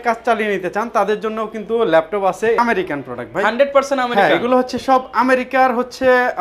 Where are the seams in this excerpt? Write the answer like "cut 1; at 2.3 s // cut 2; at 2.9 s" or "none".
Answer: cut 1; at 2.6 s